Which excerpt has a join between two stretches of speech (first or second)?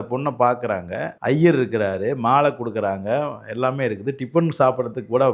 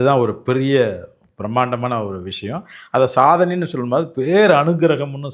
first